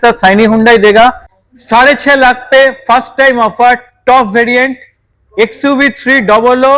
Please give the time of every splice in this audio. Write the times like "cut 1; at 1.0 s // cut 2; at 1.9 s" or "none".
cut 1; at 1.3 s